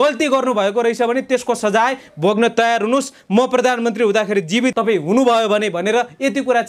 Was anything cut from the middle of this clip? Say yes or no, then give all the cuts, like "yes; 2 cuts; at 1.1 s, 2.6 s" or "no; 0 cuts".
yes; 1 cut; at 4.8 s